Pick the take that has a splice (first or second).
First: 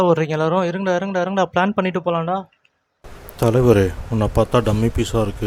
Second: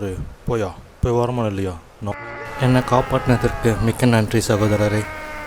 second